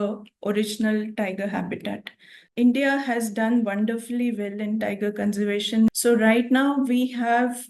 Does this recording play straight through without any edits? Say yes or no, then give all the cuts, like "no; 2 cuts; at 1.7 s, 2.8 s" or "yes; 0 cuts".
no; 2 cuts; at 2.5 s, 5.9 s